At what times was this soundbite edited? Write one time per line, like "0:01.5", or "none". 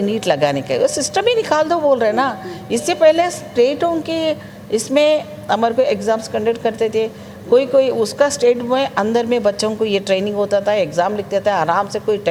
none